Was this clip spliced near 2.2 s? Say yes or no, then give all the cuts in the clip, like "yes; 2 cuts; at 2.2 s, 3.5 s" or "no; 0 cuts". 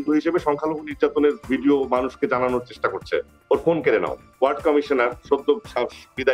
no; 1 cut; at 4.3 s